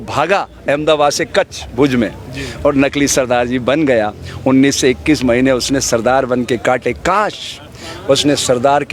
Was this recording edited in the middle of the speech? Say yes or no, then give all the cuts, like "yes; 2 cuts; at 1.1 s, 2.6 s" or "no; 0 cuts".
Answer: no; 0 cuts